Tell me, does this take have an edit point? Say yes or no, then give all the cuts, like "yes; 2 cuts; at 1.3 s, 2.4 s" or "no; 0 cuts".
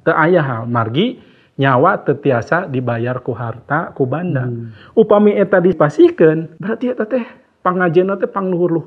yes; 2 cuts; at 5.8 s, 6.5 s